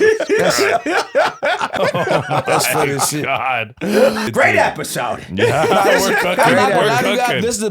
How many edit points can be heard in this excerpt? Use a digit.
2